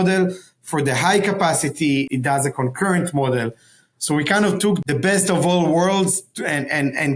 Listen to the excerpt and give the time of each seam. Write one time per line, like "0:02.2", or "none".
0:02.1
0:04.8